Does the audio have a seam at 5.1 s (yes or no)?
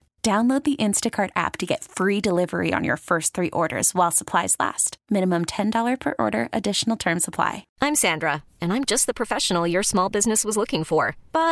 no